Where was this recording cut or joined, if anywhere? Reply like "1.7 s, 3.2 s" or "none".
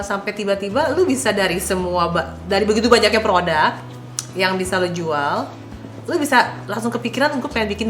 none

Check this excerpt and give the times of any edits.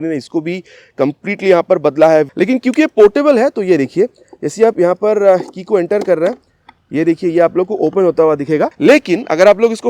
2.3 s, 8.7 s

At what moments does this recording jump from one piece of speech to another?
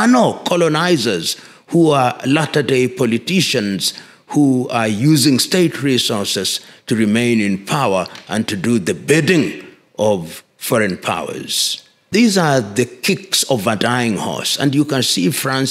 12.1 s

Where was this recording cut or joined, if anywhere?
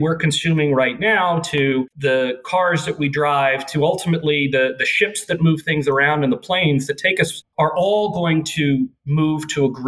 none

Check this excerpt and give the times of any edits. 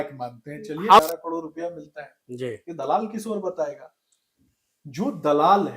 1.0 s

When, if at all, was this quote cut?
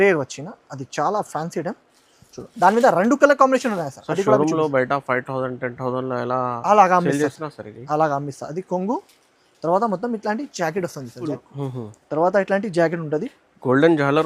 11.3 s

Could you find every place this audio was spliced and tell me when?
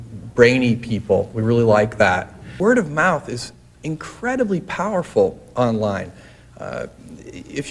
2.4 s

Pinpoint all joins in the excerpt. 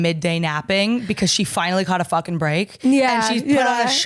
none

